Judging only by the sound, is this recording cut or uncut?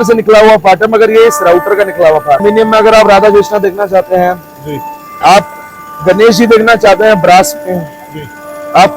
cut